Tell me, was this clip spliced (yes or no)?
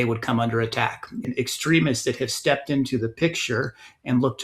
yes